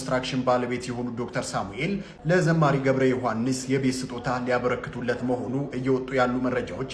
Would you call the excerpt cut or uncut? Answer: uncut